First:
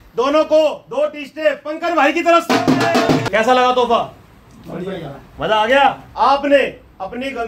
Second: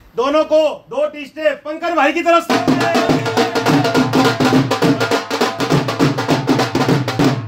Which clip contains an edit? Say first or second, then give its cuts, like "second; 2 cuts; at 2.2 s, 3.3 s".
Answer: first; 2 cuts; at 3.3 s, 6.0 s